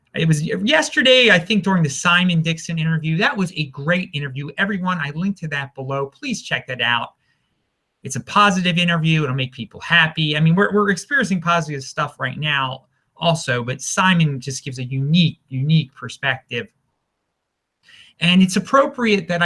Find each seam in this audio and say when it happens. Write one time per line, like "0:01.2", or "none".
0:05.4